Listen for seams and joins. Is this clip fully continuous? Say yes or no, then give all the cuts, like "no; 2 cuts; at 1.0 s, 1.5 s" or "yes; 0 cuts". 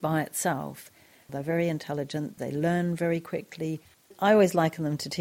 no; 3 cuts; at 1.3 s, 2.4 s, 4.1 s